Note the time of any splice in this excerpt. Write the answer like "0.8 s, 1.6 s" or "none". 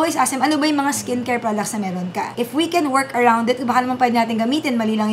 none